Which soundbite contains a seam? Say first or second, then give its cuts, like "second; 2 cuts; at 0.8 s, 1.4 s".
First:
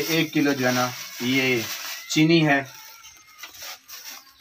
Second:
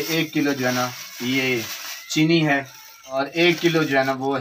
second; 1 cut; at 3.2 s